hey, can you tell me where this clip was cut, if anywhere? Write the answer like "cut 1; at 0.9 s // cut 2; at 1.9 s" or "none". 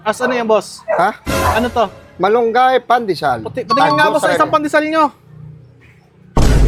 none